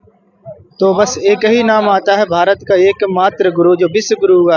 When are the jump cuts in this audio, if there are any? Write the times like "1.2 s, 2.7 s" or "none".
none